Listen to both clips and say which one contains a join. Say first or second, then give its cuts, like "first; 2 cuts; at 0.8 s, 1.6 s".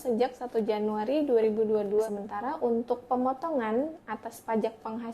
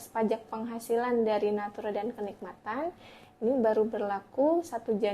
first; 1 cut; at 2.1 s